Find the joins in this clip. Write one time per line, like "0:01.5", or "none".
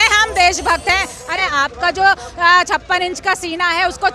0:01.3